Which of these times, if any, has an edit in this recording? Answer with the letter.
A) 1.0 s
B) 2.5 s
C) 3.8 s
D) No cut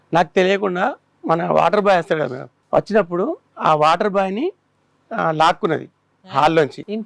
B